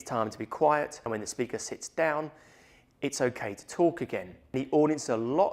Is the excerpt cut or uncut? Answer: cut